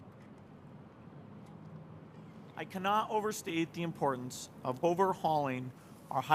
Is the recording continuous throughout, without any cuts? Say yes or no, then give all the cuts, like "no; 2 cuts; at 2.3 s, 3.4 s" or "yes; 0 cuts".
no; 1 cut; at 2.7 s